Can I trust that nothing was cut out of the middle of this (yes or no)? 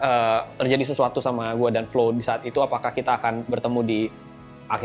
yes